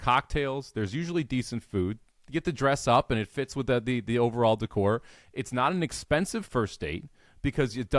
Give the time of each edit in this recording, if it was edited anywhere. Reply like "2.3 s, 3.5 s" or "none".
none